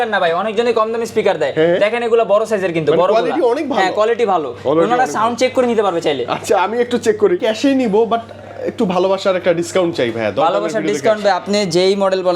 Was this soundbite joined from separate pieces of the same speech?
yes; 1 cut; at 7.4 s

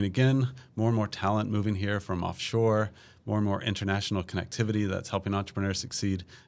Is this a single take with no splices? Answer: yes; 0 cuts

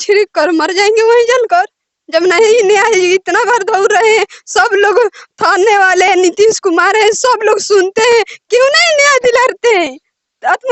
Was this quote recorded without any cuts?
yes; 0 cuts

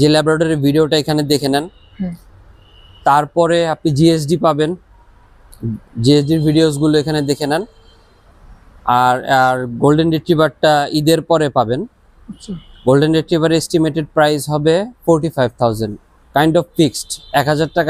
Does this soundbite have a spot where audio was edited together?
no; 0 cuts

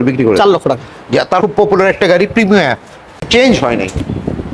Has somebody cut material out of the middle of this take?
yes; 1 cut; at 3.2 s

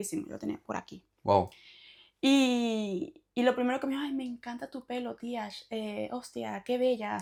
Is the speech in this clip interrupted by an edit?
no; 0 cuts

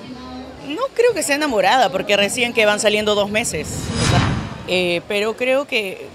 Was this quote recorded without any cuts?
no; 1 cut; at 4.2 s

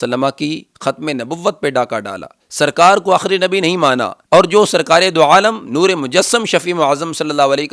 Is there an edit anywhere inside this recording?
yes; 1 cut; at 2.3 s

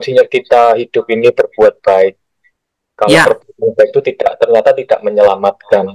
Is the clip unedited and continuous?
yes; 0 cuts

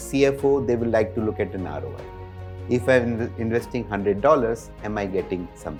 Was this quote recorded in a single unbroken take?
yes; 0 cuts

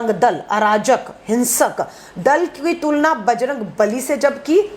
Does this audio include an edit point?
no; 0 cuts

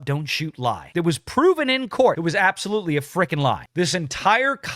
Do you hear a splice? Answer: yes; 3 cuts; at 0.8 s, 2.2 s, 3.7 s

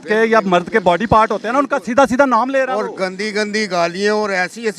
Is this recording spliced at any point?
no; 0 cuts

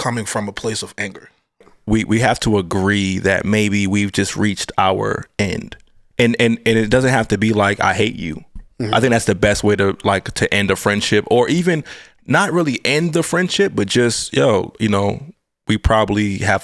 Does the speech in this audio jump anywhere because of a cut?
yes; 1 cut; at 1.6 s

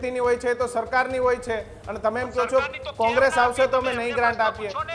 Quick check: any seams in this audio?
no; 0 cuts

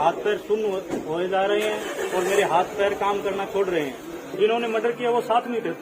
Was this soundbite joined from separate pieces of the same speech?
yes; 1 cut; at 4.3 s

